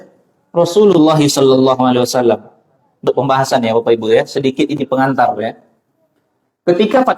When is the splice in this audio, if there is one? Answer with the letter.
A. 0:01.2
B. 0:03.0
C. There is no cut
B